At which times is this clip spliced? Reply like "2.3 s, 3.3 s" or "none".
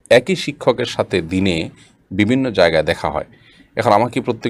none

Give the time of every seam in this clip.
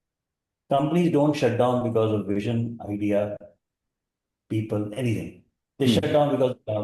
none

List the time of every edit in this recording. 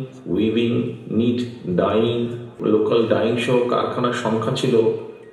2.6 s

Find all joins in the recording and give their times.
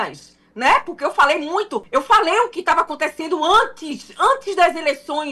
1.8 s

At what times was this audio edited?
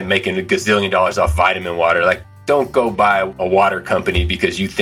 2.3 s, 3.3 s

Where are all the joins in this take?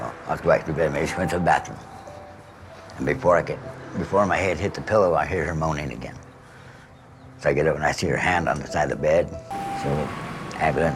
9.4 s

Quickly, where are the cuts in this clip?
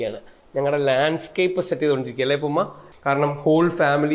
2.8 s

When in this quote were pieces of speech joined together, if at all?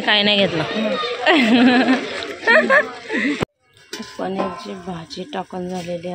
3.5 s

